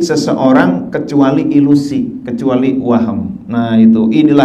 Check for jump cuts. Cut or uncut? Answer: uncut